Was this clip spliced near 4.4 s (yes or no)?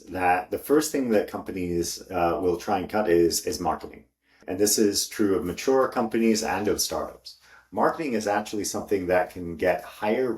yes